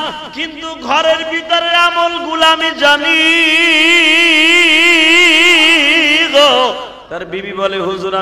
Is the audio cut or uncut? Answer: cut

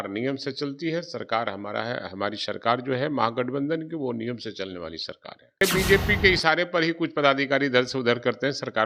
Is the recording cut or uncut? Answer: cut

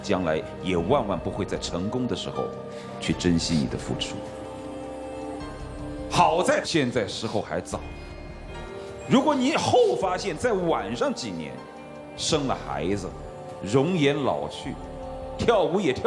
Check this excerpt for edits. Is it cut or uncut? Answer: uncut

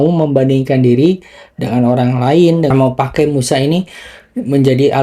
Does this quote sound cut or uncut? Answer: cut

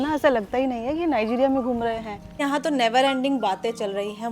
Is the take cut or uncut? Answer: cut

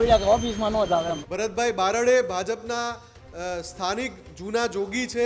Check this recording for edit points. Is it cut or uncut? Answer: cut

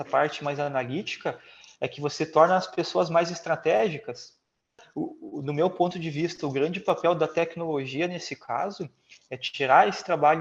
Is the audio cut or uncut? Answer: cut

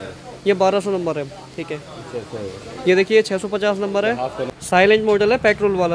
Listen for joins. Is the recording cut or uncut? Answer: cut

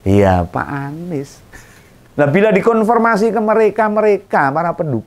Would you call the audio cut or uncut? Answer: cut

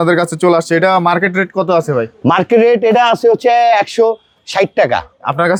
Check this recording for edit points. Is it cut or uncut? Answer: uncut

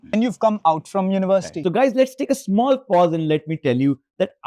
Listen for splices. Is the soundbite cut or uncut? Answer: uncut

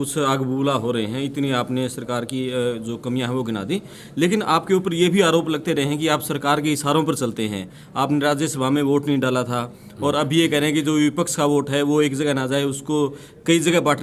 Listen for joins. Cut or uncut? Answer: uncut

